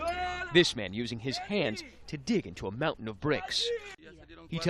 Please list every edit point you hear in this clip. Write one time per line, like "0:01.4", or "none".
0:03.0

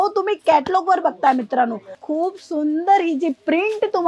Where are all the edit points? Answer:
0:02.0

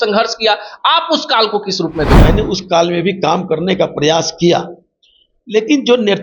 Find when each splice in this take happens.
0:02.2

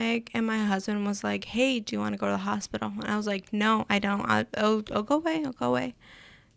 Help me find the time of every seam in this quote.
none

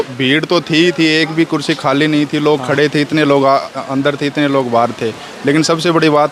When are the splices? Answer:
none

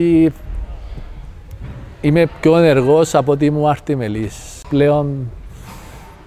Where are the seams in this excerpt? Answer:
0:04.7

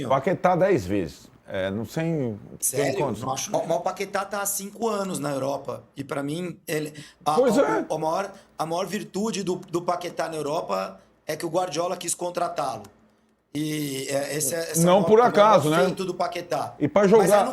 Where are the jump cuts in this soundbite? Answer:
0:03.5

